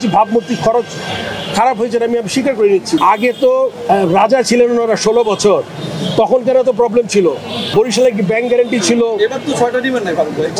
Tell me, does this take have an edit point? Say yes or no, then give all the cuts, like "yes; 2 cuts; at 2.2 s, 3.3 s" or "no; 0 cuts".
yes; 2 cuts; at 3.0 s, 7.6 s